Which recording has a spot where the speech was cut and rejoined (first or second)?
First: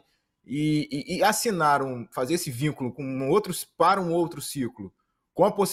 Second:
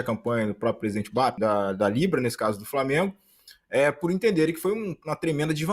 second